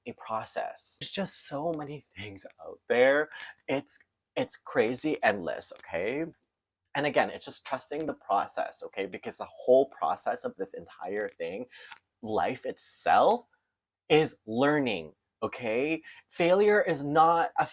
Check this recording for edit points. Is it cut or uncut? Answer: uncut